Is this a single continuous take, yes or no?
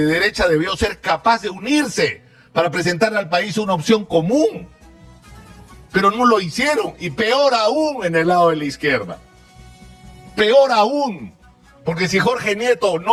yes